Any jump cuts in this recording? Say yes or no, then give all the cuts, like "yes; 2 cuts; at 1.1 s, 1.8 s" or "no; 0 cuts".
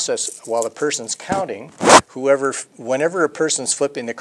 yes; 1 cut; at 0.9 s